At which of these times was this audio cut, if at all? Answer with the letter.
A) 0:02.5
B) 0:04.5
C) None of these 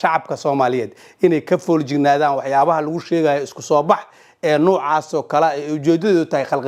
C